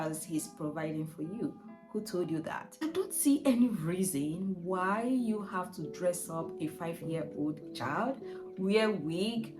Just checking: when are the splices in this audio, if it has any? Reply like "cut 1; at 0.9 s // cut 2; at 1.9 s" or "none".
cut 1; at 2.8 s